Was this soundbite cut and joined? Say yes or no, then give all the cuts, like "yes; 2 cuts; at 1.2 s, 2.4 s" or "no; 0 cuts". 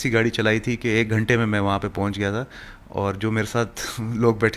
no; 0 cuts